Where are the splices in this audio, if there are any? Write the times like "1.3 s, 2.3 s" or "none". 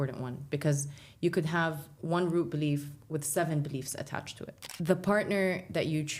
4.6 s